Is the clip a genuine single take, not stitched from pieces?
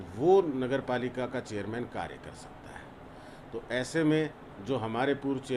yes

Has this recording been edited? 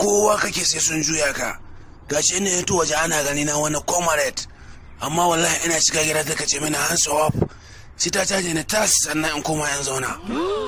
no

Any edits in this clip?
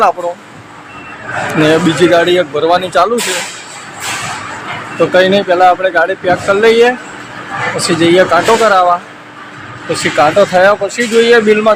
no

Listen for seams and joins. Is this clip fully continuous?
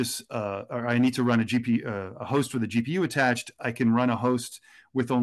yes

